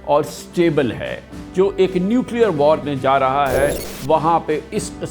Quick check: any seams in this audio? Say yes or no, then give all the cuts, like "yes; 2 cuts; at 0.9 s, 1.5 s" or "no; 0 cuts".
yes; 2 cuts; at 1.4 s, 2.8 s